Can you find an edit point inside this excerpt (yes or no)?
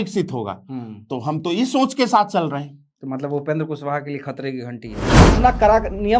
yes